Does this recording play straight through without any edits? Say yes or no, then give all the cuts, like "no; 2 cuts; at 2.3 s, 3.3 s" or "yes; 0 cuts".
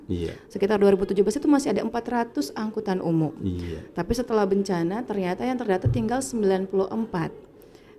yes; 0 cuts